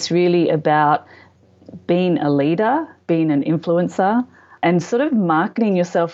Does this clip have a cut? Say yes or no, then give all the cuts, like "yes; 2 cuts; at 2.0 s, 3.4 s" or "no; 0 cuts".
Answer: yes; 2 cuts; at 1.4 s, 4.6 s